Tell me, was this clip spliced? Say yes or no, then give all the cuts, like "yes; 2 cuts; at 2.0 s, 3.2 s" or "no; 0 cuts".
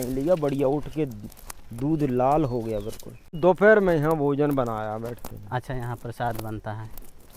yes; 1 cut; at 3.4 s